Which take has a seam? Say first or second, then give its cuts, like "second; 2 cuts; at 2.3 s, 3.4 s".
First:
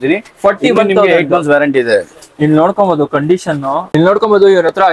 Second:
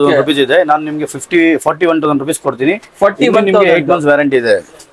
first; 1 cut; at 3.9 s